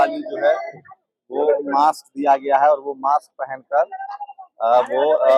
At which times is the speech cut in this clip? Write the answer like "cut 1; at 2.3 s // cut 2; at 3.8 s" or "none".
none